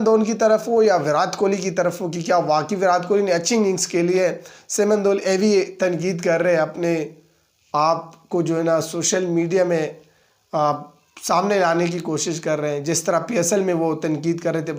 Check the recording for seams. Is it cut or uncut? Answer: uncut